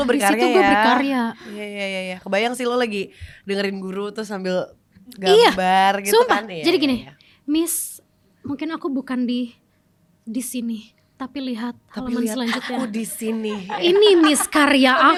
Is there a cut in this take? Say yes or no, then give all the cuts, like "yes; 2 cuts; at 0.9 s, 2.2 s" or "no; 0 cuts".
no; 0 cuts